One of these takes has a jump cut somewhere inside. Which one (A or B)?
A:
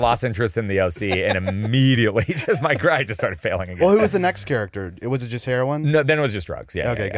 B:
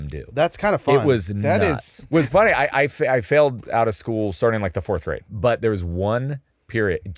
B